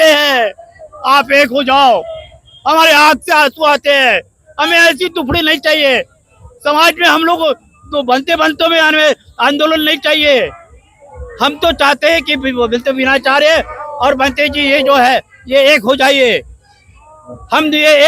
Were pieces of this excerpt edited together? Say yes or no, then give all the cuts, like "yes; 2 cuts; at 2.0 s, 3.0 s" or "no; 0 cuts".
no; 0 cuts